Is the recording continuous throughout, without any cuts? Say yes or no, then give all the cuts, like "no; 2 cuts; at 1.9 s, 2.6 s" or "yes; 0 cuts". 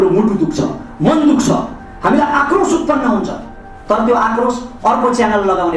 yes; 0 cuts